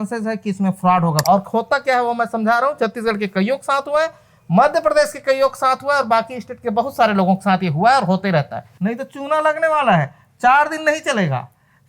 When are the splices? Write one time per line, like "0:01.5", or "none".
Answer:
0:01.2
0:08.6